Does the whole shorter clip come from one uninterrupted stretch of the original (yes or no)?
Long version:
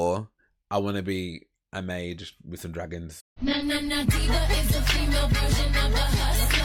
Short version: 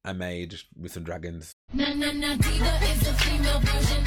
yes